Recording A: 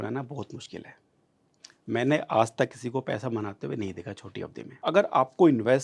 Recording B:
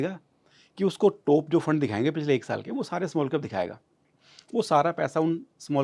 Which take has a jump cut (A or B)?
A